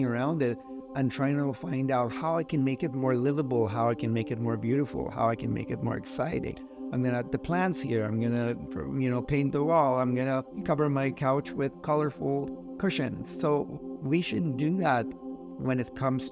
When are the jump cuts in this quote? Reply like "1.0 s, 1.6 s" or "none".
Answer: 10.5 s, 11.8 s